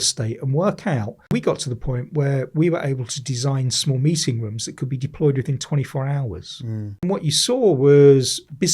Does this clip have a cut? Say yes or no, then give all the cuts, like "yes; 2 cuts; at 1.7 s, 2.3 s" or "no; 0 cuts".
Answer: yes; 2 cuts; at 1.3 s, 7.0 s